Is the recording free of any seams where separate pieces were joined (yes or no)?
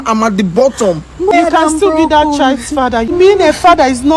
no